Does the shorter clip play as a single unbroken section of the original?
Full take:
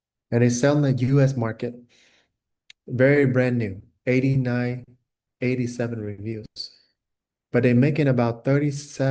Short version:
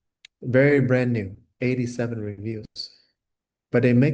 no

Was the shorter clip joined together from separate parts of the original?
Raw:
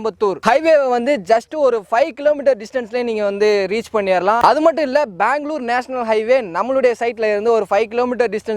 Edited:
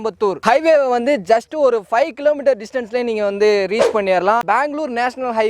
yes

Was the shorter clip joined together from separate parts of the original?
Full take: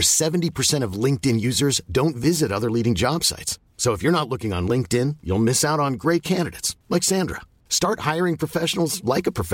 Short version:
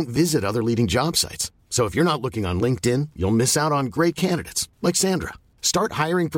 no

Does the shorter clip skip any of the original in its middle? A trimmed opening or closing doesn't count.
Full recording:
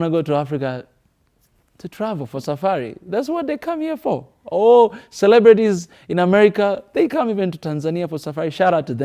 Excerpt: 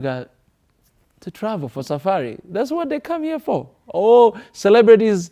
no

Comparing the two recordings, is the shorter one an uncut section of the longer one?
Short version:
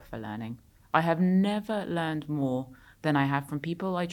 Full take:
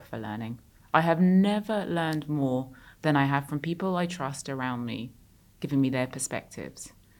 yes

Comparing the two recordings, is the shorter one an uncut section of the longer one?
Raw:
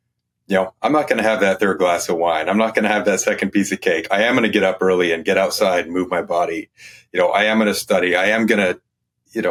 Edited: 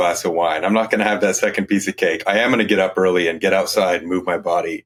yes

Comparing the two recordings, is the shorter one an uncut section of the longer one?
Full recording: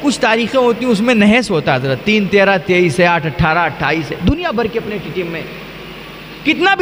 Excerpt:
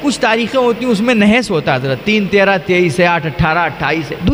yes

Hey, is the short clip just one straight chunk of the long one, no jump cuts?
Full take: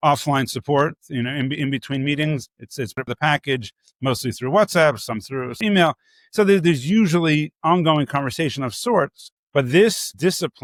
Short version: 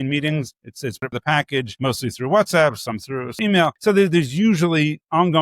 no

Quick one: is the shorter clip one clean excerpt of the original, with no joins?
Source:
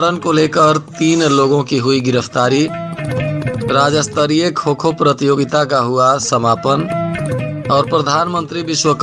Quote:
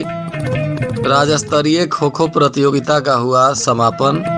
yes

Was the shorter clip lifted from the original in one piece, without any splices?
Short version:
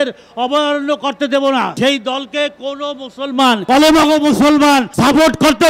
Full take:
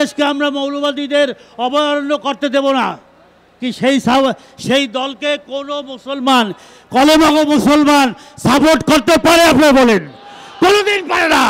no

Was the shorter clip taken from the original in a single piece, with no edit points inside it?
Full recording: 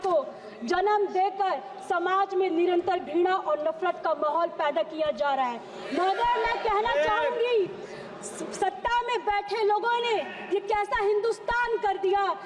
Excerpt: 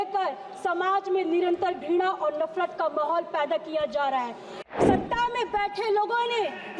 no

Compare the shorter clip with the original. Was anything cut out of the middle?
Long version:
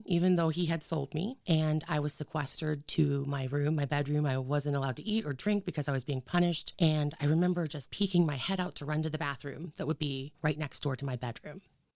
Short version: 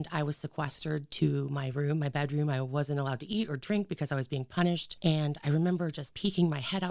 no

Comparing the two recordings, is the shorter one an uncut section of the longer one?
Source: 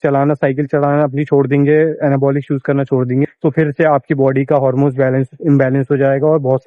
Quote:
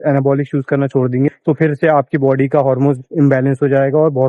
no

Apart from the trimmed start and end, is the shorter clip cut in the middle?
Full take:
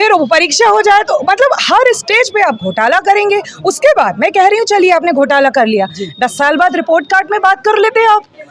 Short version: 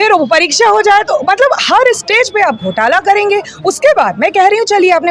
no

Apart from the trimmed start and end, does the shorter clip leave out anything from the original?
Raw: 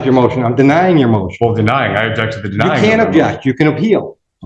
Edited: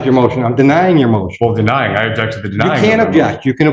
no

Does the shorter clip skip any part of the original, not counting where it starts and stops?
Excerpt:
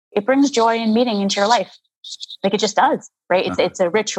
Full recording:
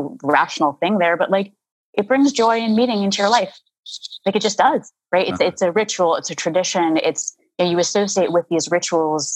no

